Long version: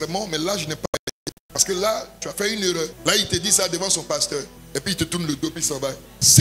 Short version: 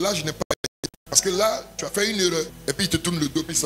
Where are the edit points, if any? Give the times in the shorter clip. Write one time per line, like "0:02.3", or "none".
0:02.5